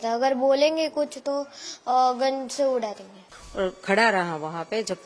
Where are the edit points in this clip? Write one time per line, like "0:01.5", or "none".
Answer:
0:03.4